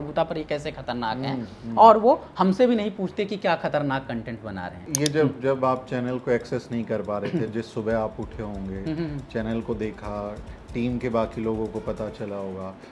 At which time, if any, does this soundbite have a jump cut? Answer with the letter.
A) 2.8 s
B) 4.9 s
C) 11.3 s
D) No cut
B